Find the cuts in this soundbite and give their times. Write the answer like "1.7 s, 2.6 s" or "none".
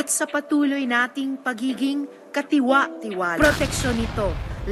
3.3 s